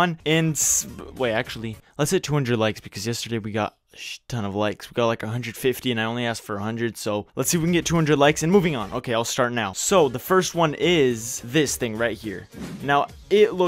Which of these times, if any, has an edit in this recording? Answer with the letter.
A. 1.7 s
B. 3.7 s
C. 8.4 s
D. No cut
C